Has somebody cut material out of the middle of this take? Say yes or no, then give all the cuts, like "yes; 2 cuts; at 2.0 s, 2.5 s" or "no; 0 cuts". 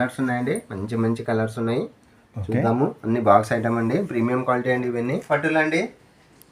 yes; 1 cut; at 5.2 s